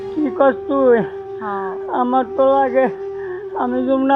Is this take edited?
no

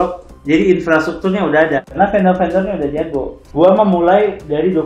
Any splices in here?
yes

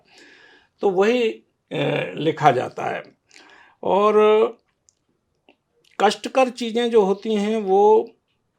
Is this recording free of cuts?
yes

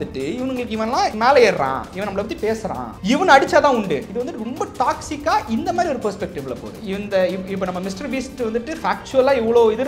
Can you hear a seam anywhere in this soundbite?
yes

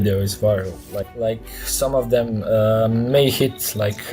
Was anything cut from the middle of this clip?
yes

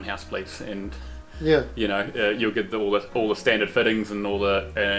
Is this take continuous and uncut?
yes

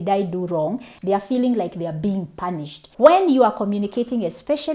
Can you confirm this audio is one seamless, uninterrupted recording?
no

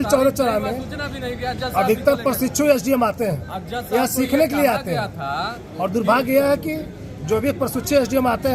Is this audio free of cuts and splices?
yes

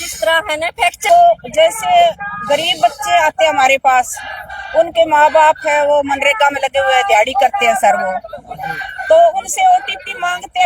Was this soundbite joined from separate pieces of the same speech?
yes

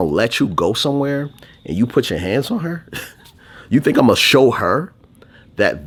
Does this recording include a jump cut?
no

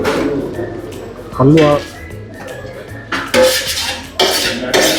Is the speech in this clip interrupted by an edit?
no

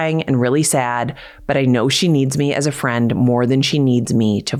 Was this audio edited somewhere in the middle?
no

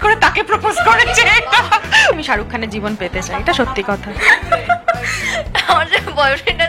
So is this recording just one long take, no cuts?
no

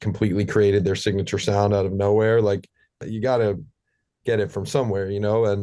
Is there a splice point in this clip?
yes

